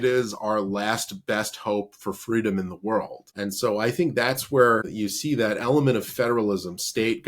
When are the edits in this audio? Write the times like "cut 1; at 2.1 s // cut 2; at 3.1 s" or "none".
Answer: cut 1; at 3.2 s // cut 2; at 4.9 s